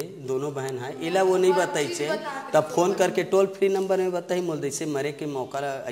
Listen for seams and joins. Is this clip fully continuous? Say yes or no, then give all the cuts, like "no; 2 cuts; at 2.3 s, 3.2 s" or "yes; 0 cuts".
yes; 0 cuts